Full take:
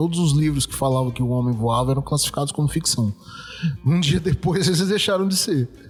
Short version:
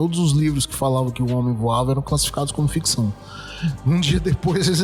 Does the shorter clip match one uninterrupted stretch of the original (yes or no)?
yes